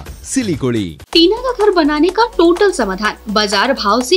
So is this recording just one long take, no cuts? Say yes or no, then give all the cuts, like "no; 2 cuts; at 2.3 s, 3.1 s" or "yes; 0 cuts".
no; 1 cut; at 1.0 s